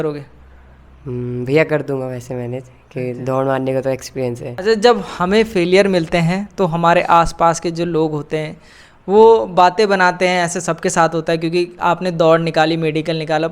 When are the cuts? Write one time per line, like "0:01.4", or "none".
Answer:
0:04.5